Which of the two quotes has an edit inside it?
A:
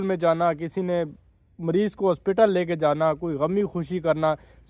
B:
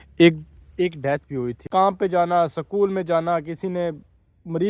B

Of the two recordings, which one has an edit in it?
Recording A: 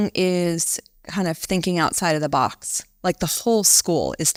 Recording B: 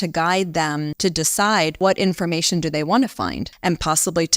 B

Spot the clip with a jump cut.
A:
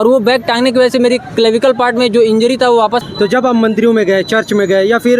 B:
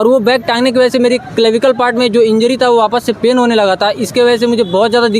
A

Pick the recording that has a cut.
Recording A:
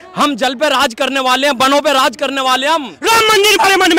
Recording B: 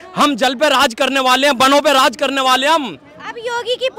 A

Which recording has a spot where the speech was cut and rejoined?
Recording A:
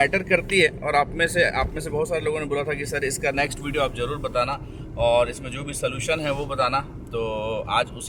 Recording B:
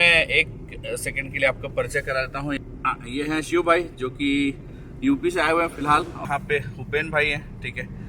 B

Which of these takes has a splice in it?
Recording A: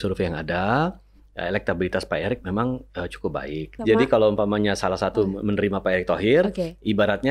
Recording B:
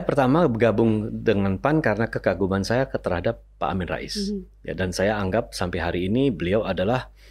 A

